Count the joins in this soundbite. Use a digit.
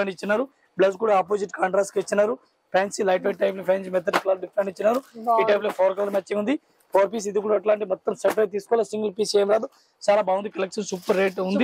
0